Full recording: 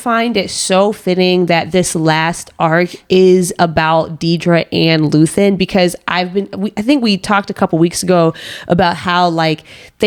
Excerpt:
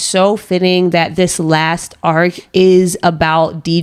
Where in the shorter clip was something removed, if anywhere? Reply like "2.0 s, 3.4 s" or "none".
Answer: none